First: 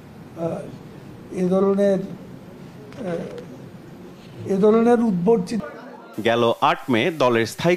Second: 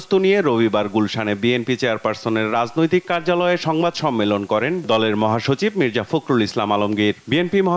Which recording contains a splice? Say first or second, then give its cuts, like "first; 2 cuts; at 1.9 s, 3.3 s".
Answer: first; 1 cut; at 5.6 s